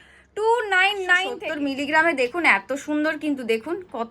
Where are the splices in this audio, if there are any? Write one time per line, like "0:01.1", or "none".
0:01.3